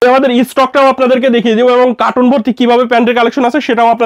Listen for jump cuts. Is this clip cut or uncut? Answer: uncut